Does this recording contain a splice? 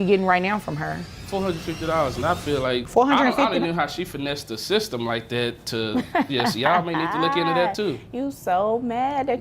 yes; 2 cuts; at 1.1 s, 2.9 s

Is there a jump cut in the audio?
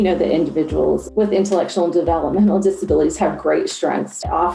no; 0 cuts

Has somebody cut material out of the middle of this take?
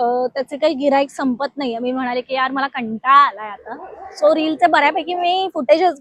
no; 0 cuts

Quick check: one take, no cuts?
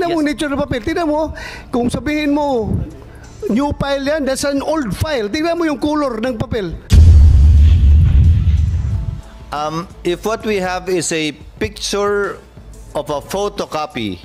no; 2 cuts; at 6.8 s, 9.0 s

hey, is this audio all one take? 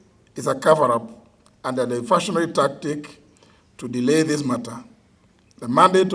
yes; 0 cuts

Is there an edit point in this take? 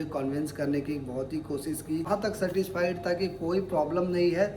yes; 1 cut; at 2.1 s

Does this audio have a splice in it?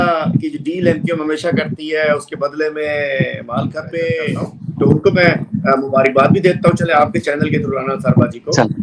yes; 1 cut; at 4.5 s

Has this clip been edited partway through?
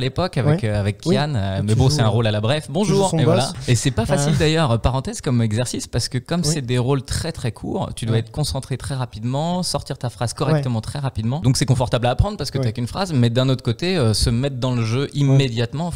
yes; 2 cuts; at 3.5 s, 11.4 s

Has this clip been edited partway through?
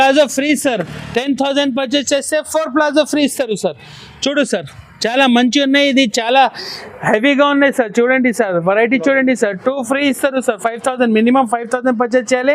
no; 0 cuts

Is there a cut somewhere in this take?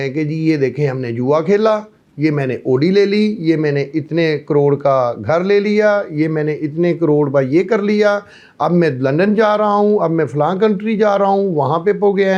no; 0 cuts

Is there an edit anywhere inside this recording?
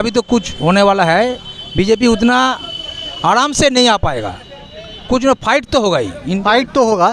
no; 0 cuts

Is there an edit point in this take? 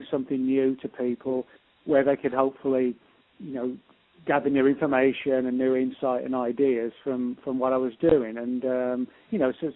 yes; 1 cut; at 3.9 s

